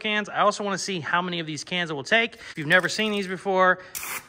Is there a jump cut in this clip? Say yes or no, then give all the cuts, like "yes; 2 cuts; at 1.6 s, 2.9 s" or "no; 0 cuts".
yes; 1 cut; at 2.5 s